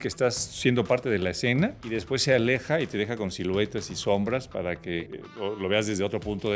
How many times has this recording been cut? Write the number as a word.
two